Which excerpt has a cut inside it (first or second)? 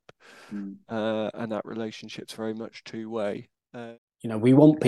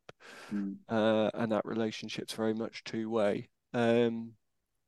first